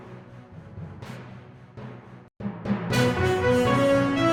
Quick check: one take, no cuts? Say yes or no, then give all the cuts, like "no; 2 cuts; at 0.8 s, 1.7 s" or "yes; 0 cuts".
yes; 0 cuts